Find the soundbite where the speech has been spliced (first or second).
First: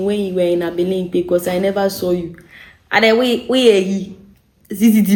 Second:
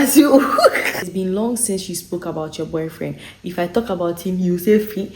second